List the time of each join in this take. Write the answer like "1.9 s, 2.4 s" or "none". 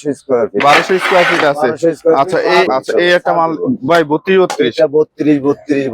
2.7 s